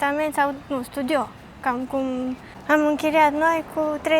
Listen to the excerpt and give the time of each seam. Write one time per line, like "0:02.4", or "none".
0:02.5